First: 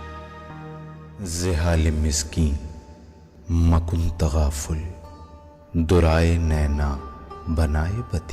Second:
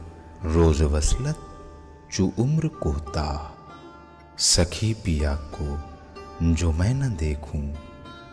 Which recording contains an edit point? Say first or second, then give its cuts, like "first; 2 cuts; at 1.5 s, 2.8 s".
first; 1 cut; at 1.3 s